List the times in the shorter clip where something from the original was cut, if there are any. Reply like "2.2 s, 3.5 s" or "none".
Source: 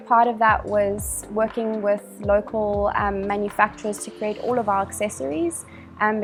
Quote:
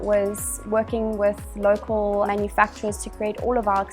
2.3 s